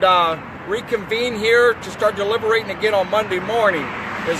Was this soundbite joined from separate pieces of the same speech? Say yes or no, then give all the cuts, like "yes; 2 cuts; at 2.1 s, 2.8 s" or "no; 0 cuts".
yes; 1 cut; at 2.3 s